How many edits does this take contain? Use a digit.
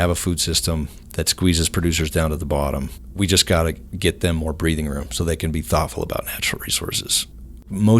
1